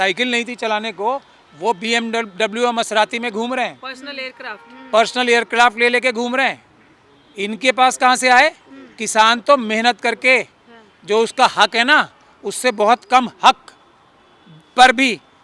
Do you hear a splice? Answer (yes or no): no